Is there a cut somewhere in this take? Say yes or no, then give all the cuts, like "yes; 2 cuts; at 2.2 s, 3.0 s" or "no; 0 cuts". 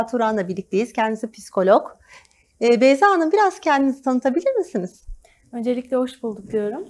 no; 0 cuts